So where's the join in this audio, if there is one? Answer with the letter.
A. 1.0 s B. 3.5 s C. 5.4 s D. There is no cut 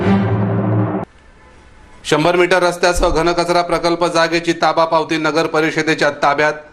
A